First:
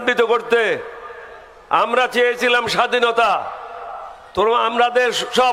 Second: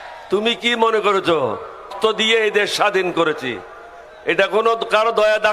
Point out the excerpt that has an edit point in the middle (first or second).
second